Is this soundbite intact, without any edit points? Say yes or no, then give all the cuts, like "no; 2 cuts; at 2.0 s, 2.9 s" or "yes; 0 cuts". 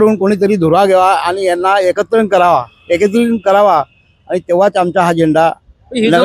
yes; 0 cuts